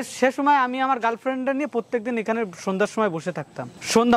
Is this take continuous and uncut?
yes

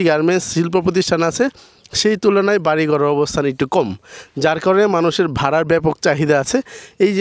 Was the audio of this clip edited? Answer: no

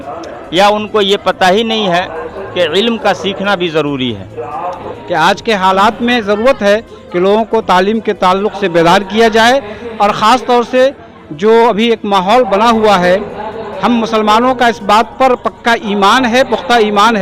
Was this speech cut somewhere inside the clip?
yes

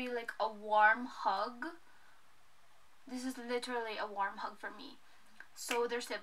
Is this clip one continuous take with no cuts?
yes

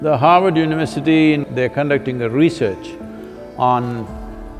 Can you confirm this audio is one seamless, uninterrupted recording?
no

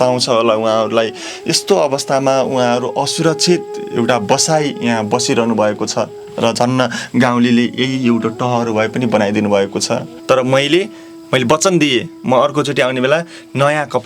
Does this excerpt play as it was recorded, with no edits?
no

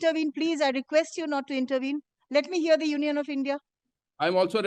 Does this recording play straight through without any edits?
yes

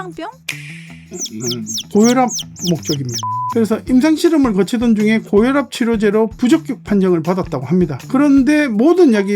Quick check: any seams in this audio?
yes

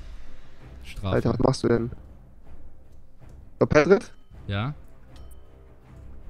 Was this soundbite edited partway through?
no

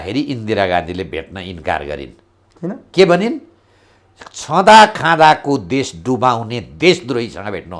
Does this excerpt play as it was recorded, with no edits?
yes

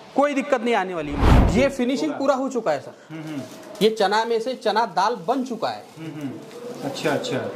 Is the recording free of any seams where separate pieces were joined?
no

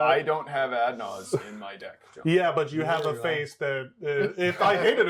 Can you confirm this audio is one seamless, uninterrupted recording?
yes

